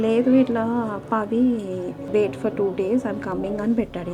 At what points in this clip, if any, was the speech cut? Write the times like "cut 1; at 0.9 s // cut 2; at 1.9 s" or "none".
cut 1; at 2.0 s